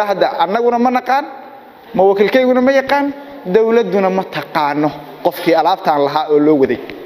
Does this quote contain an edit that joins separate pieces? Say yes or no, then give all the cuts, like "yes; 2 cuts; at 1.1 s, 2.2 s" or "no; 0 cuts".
no; 0 cuts